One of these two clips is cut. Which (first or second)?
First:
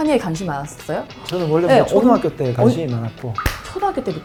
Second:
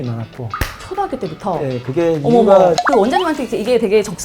second